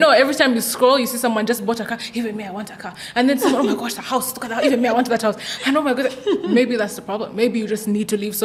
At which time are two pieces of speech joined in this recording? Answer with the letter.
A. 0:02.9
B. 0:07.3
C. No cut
C